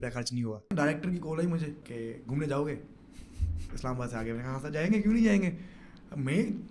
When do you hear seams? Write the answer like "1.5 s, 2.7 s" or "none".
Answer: 0.7 s, 1.8 s